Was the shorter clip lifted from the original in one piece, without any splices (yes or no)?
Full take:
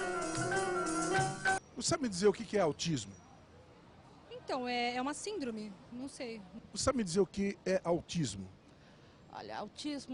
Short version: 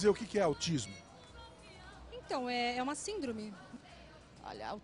no